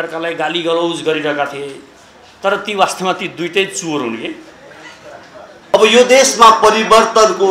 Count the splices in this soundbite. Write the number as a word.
one